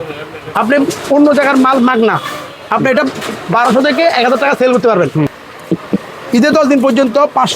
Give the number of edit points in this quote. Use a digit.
1